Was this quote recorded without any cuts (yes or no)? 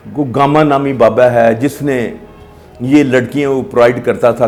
yes